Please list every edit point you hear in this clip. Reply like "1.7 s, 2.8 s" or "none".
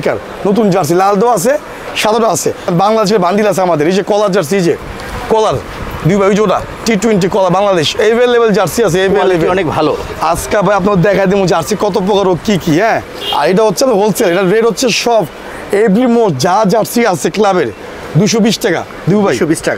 2.7 s, 13.1 s